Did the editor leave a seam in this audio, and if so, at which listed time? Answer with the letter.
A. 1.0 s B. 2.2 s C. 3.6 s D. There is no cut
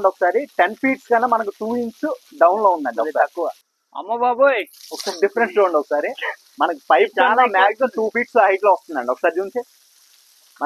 C